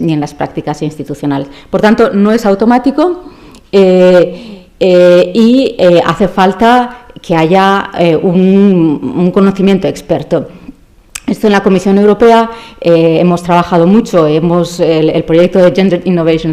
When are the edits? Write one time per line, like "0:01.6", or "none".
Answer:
0:05.0